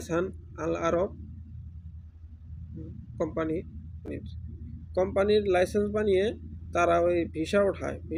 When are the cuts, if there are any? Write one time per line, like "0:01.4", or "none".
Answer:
0:04.1

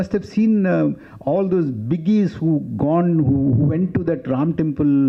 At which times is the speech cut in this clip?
none

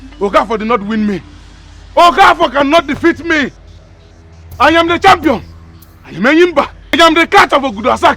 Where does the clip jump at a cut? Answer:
0:07.0

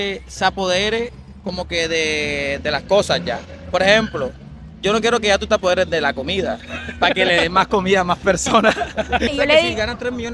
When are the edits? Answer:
0:09.3

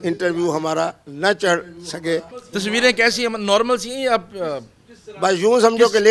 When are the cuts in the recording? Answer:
0:02.4

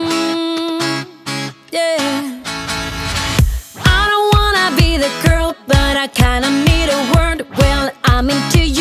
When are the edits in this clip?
0:01.6

